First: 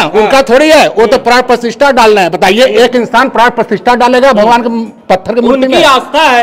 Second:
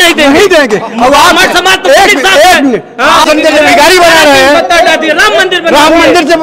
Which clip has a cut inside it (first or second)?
second